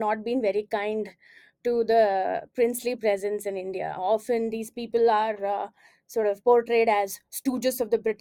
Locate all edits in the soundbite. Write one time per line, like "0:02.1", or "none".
none